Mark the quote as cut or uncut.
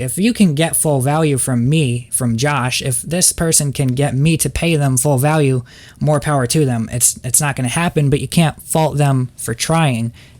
uncut